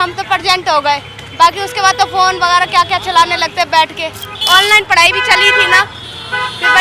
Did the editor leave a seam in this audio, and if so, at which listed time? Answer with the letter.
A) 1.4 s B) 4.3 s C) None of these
B